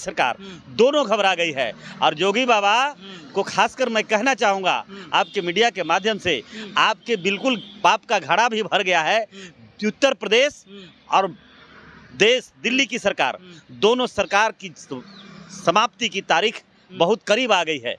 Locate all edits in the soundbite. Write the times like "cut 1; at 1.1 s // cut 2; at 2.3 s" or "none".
none